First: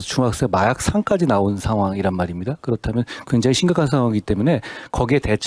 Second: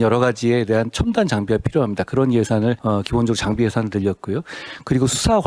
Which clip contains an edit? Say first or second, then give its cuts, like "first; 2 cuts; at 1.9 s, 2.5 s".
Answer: second; 1 cut; at 2.8 s